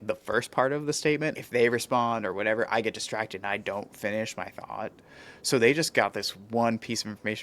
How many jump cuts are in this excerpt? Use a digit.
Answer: 1